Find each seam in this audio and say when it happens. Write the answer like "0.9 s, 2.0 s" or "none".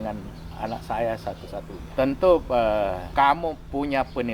1.8 s, 3.0 s